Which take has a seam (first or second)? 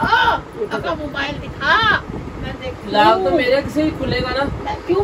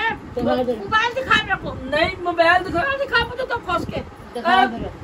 second